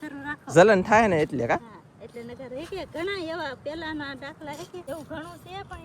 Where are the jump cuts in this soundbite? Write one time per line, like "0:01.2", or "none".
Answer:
0:04.8